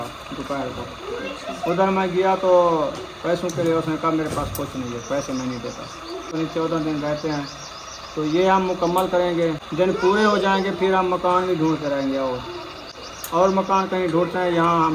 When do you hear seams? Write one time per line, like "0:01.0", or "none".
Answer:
0:06.3
0:09.6